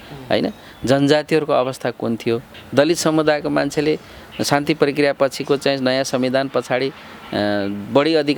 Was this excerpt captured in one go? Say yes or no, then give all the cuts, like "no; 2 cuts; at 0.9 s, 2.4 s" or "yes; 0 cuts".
no; 1 cut; at 2.5 s